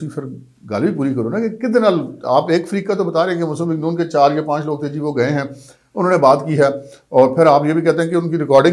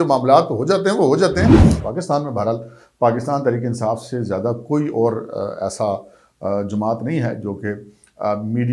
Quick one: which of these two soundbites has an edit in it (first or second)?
second